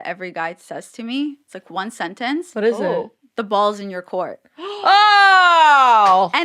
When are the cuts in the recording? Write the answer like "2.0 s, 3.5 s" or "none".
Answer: none